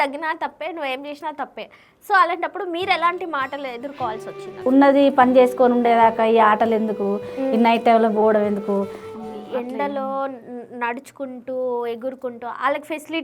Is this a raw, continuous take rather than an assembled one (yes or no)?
no